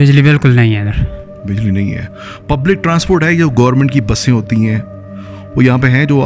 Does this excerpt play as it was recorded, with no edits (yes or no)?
yes